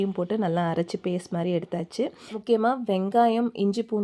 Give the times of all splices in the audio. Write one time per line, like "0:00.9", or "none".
0:02.3